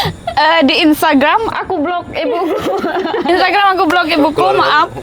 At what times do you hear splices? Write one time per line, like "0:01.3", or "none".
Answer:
0:03.3

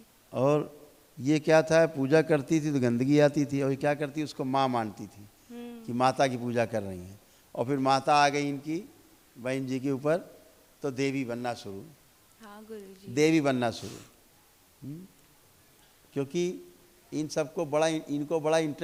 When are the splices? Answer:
none

